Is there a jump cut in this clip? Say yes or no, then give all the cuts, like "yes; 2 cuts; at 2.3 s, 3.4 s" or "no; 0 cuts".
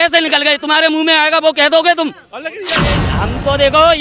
yes; 1 cut; at 3.1 s